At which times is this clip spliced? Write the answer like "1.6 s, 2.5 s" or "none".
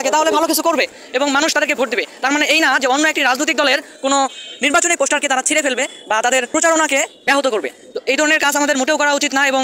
6.5 s, 7.1 s